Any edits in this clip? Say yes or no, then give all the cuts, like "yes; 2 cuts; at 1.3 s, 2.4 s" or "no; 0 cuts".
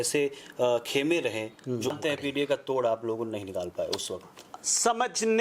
yes; 1 cut; at 1.9 s